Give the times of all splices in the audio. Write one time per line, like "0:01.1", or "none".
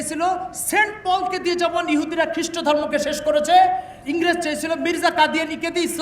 0:03.9